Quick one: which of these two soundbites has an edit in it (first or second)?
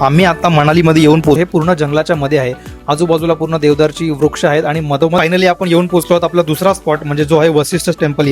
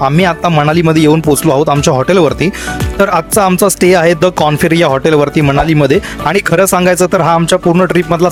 first